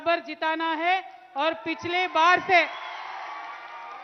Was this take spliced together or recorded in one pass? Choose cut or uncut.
uncut